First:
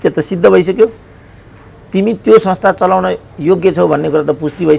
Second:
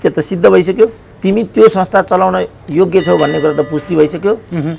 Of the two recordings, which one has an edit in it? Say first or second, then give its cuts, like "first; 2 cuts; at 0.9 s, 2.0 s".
second; 1 cut; at 1.1 s